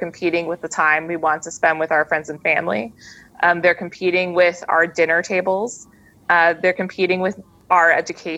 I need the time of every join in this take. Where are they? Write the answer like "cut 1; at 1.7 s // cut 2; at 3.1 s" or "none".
cut 1; at 7.5 s